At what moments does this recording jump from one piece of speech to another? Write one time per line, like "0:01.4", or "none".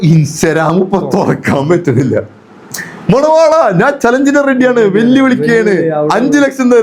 none